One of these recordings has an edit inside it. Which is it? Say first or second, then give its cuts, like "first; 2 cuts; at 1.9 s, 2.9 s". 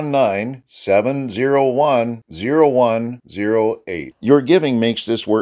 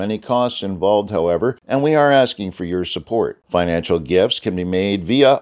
second; 1 cut; at 1.6 s